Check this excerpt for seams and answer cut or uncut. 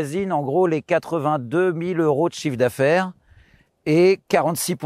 uncut